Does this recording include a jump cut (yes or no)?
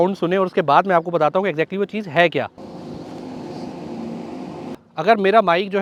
no